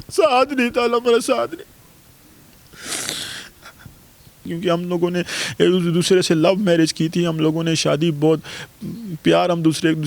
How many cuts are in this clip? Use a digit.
1